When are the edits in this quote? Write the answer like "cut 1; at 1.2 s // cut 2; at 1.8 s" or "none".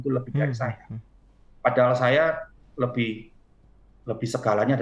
none